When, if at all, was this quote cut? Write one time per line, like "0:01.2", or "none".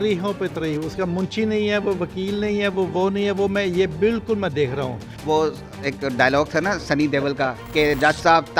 0:05.1
0:07.6